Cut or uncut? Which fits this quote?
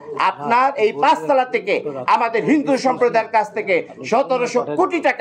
uncut